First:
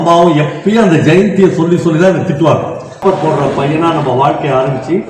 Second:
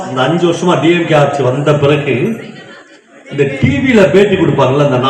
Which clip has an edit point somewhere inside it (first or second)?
first